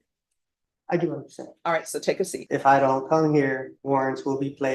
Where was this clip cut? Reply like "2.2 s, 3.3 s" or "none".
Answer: 2.4 s, 3.7 s